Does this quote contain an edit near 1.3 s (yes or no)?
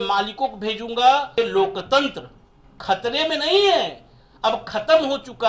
yes